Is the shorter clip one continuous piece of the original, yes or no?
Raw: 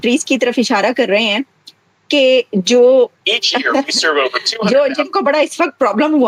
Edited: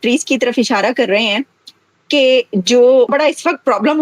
no